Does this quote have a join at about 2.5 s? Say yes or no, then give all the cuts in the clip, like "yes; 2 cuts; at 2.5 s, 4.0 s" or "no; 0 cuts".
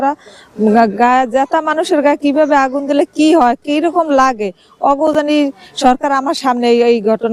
no; 0 cuts